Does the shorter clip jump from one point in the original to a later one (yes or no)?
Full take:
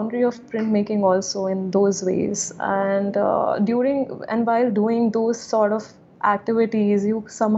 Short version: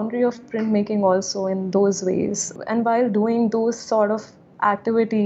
yes